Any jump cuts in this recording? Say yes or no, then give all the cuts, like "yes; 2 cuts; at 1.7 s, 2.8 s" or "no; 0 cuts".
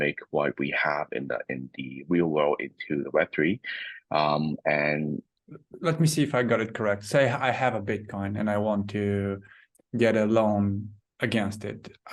yes; 1 cut; at 5.3 s